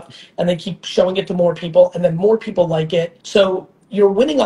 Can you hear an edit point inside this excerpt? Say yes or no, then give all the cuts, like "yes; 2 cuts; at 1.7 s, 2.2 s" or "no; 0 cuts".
yes; 1 cut; at 3.2 s